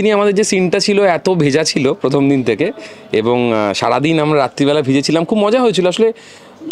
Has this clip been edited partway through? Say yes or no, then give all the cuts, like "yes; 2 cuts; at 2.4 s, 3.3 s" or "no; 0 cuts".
no; 0 cuts